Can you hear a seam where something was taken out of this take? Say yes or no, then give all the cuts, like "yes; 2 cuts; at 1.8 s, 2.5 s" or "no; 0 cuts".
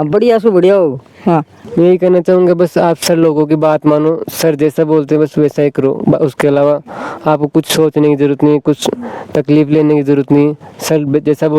yes; 1 cut; at 1.6 s